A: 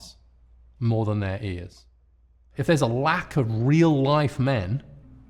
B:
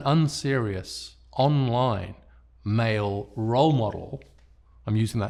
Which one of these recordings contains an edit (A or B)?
A